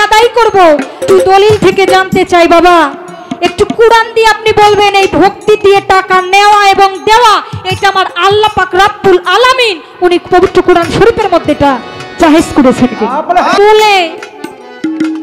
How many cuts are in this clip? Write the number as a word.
two